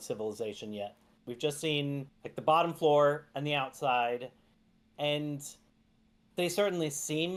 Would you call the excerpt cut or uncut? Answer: uncut